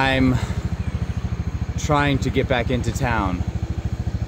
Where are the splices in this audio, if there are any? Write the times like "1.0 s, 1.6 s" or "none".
none